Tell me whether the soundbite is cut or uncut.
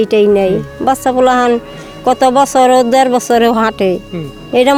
uncut